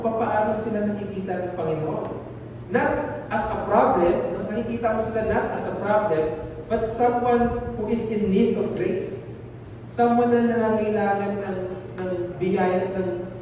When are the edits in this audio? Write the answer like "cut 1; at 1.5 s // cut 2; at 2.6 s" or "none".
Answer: none

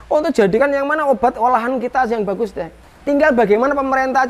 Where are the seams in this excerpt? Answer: cut 1; at 2.8 s

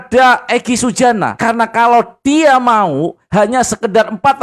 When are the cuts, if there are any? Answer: cut 1; at 1.3 s

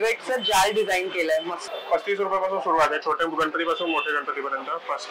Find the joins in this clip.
cut 1; at 1.6 s

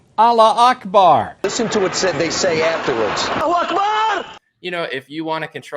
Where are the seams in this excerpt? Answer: cut 1; at 4.4 s

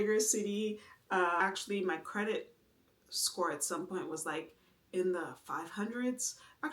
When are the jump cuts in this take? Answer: cut 1; at 1.4 s

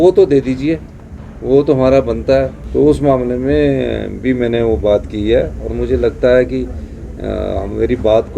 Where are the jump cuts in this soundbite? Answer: cut 1; at 2.6 s

